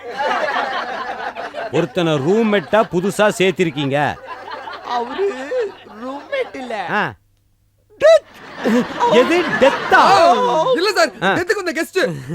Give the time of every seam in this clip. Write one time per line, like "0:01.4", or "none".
none